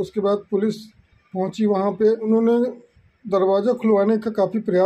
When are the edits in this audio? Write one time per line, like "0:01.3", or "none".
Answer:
0:02.2